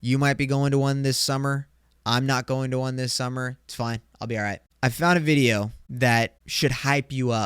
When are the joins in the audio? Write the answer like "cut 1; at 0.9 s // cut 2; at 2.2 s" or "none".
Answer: cut 1; at 4.6 s // cut 2; at 5.8 s // cut 3; at 6.4 s